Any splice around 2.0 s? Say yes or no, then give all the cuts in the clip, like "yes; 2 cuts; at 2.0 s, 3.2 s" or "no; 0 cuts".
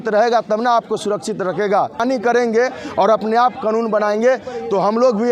yes; 1 cut; at 2.0 s